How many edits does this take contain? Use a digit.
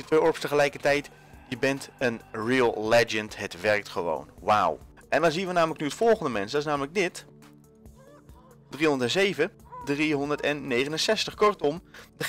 1